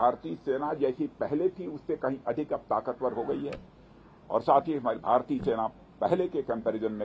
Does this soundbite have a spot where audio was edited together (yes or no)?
no